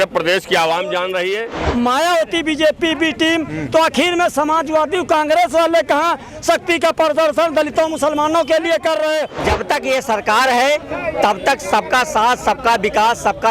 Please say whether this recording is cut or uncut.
cut